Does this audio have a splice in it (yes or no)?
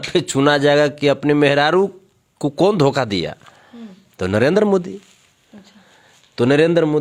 no